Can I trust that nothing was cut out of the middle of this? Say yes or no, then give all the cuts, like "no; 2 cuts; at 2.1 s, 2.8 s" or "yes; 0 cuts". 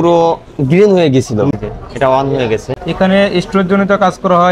no; 2 cuts; at 1.5 s, 2.8 s